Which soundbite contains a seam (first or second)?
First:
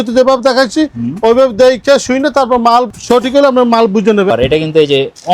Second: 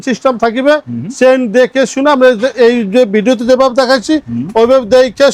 first